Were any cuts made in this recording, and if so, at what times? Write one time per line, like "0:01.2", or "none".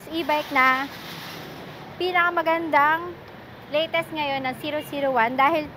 none